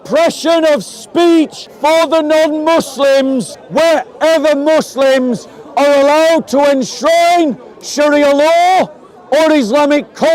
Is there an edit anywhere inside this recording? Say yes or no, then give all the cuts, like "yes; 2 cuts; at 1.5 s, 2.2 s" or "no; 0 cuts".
yes; 2 cuts; at 1.6 s, 3.6 s